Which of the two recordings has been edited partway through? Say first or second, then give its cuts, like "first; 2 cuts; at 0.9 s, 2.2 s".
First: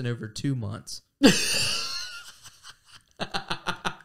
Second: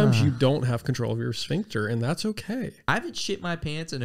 second; 1 cut; at 2.8 s